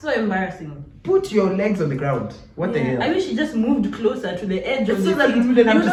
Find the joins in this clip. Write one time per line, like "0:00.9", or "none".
none